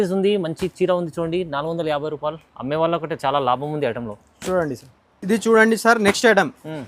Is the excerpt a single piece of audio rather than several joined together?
yes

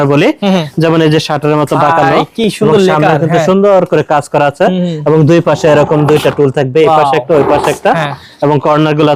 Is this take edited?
no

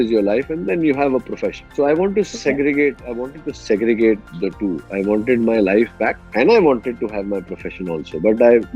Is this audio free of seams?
yes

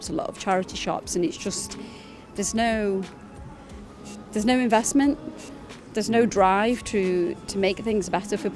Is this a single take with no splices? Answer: yes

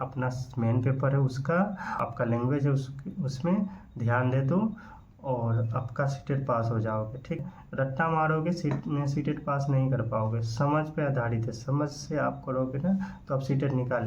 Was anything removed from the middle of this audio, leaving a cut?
yes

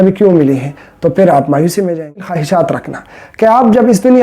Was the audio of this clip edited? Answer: yes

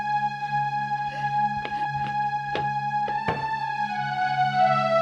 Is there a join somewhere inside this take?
no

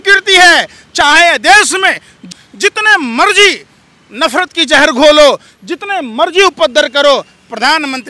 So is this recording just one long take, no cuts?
yes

